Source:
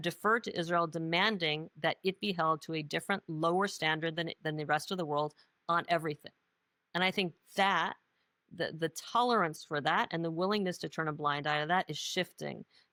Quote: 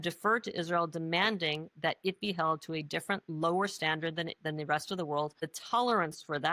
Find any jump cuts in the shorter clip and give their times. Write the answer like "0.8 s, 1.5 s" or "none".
5.5 s